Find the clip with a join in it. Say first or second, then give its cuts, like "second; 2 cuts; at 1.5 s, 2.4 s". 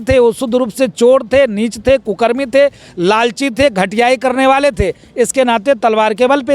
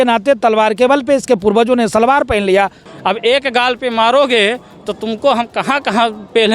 second; 1 cut; at 2.8 s